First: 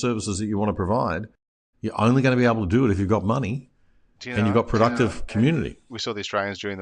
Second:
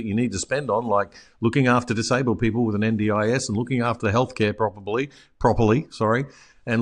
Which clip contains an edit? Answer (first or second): first